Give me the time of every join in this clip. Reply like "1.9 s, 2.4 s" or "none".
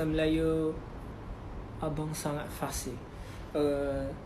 none